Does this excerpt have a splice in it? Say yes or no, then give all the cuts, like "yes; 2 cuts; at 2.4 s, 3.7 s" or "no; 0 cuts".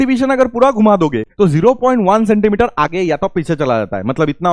yes; 1 cut; at 1.2 s